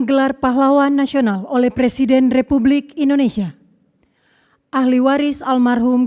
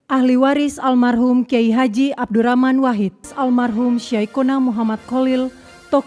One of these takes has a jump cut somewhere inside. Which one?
second; 1 cut; at 3.3 s

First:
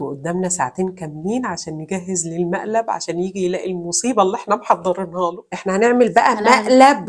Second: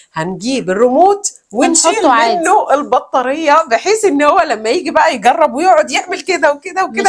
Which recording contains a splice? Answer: first; 1 cut; at 5.4 s

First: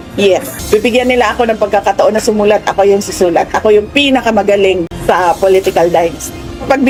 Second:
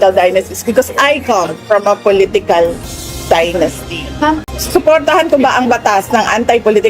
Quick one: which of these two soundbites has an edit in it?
second; 1 cut; at 4.5 s

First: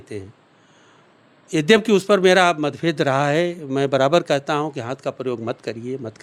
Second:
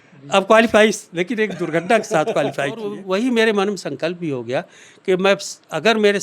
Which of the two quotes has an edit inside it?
second; 1 cut; at 3.0 s

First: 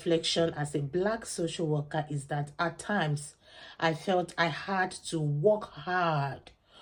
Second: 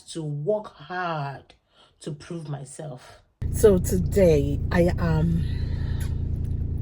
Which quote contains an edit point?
second; 1 cut; at 3.4 s

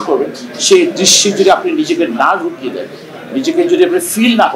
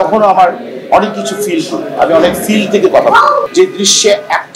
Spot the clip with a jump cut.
second; 1 cut; at 3.5 s

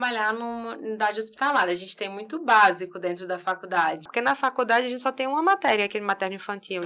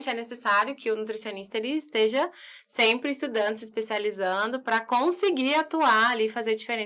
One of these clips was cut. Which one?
first; 1 cut; at 4.1 s

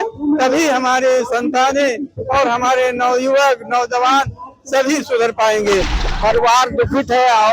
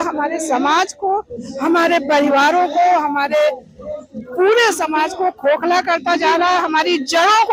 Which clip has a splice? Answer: first; 1 cut; at 6.0 s

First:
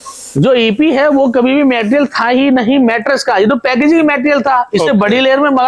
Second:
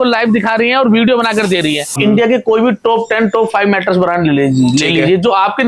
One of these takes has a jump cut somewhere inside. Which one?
second; 1 cut; at 2.0 s

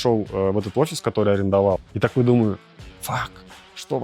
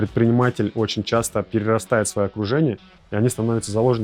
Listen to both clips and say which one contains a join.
first; 1 cut; at 1.8 s

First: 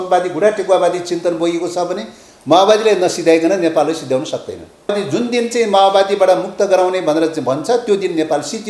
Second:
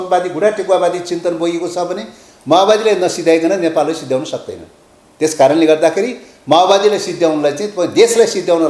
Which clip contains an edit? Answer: first; 1 cut; at 4.9 s

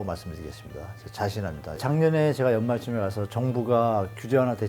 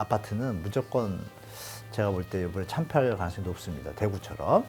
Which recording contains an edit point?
first; 1 cut; at 1.7 s

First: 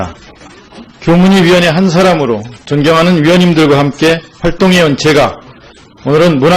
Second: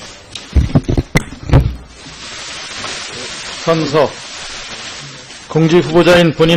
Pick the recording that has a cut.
first; 1 cut; at 5.1 s

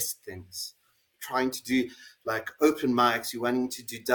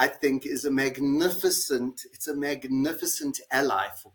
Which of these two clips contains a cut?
first; 1 cut; at 1.2 s

